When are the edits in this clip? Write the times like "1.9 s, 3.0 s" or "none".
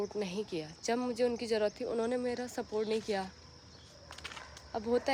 none